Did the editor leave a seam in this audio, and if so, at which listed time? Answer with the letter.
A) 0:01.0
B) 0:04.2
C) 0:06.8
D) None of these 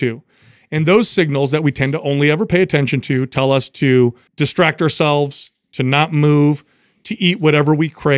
B